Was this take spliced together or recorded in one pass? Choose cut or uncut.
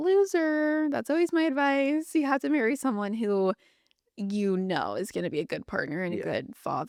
uncut